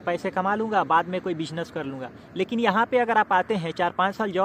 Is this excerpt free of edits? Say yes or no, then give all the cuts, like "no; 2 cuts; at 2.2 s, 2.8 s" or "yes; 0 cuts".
yes; 0 cuts